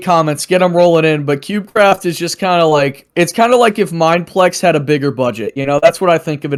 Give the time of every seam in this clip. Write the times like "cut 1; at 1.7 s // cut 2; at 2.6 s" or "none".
none